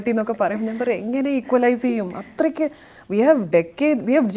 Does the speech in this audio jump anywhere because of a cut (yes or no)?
no